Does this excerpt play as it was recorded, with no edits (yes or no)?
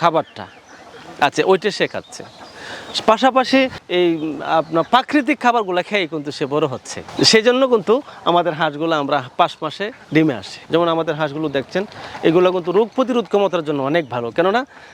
no